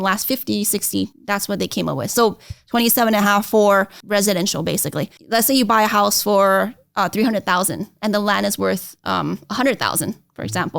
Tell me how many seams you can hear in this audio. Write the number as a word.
three